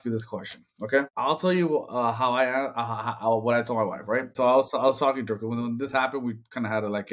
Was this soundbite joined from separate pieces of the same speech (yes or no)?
yes